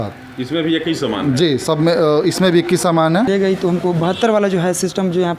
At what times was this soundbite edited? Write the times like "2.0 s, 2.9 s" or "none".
3.3 s